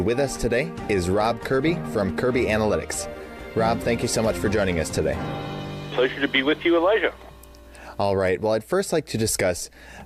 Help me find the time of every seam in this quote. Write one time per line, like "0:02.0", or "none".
none